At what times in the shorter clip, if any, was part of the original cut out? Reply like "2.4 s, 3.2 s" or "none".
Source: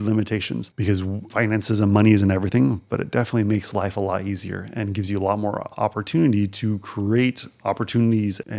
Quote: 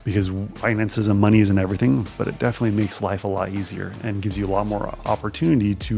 none